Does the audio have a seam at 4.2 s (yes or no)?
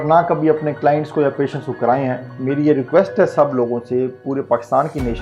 no